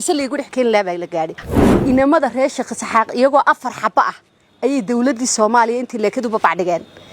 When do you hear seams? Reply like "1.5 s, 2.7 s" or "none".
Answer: 1.6 s

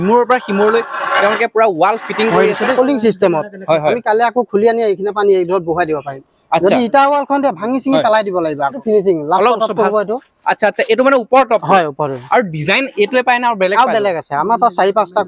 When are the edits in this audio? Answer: 2.7 s, 8.6 s

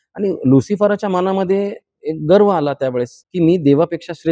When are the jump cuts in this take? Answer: 3.2 s

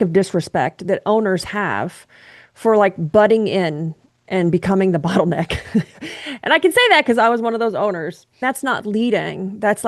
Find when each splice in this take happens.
8.4 s

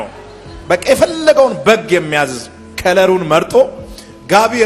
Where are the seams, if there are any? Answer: none

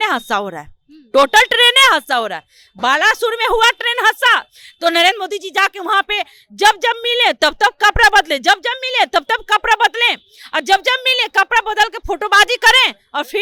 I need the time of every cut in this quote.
none

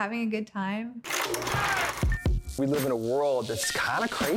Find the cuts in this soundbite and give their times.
1.1 s

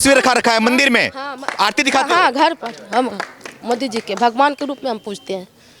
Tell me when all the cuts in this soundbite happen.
none

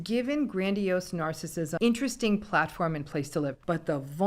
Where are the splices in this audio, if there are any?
1.7 s

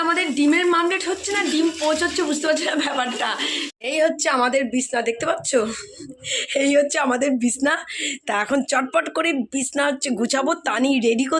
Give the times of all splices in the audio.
3.7 s

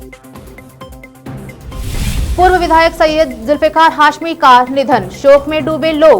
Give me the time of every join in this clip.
1.4 s

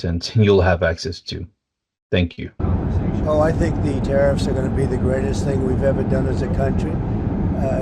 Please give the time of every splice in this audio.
2.6 s

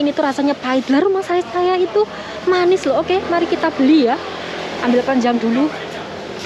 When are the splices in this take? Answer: none

